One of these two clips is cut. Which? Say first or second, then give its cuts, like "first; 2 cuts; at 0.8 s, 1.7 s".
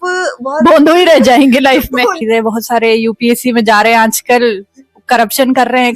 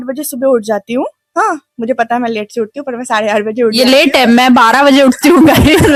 first; 1 cut; at 2.2 s